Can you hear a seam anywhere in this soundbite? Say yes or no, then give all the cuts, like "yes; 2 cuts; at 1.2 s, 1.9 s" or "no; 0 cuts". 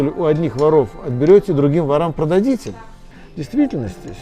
yes; 1 cut; at 3.1 s